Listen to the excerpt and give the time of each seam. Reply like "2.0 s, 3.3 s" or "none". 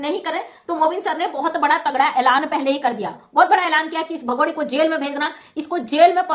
none